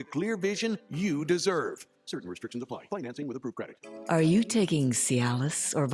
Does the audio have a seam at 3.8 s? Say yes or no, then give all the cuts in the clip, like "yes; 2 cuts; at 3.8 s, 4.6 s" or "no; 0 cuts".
yes; 1 cut; at 3.8 s